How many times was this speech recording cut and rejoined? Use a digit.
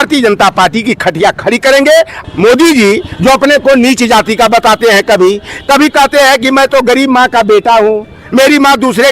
1